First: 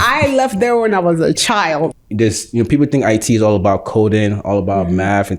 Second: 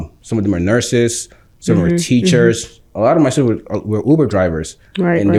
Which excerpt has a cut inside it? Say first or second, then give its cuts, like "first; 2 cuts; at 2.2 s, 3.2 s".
first; 1 cut; at 1.9 s